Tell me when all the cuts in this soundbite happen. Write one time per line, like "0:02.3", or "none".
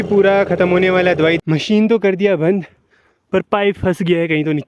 0:01.4